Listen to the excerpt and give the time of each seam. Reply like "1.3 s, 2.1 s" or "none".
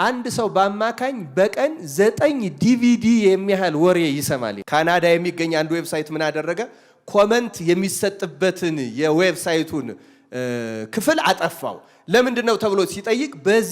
4.6 s